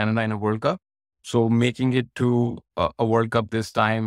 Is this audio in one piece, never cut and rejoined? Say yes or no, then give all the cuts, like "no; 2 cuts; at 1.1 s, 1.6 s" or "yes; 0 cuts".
yes; 0 cuts